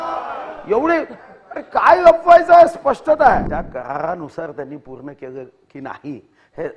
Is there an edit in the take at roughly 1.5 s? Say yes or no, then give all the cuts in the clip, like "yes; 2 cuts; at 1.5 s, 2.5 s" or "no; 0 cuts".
no; 1 cut; at 3.5 s